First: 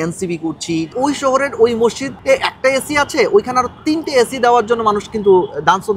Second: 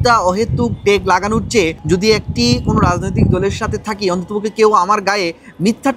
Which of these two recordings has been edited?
first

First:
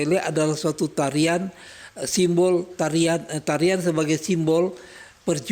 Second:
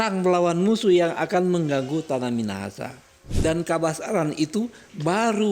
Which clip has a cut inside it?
second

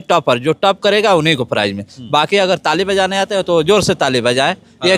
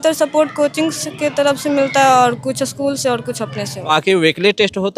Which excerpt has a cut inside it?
second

